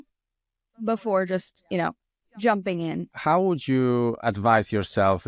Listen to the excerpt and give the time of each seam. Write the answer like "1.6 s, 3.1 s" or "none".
3.1 s